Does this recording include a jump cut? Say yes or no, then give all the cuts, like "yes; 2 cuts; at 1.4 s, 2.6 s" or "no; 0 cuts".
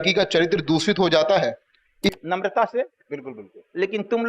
yes; 1 cut; at 2.2 s